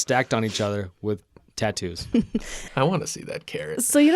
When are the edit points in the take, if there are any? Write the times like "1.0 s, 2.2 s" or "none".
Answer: 2.5 s